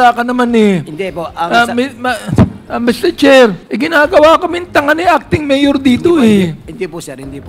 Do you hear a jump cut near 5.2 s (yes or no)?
no